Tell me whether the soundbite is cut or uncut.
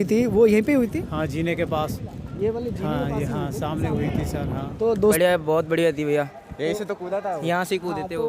cut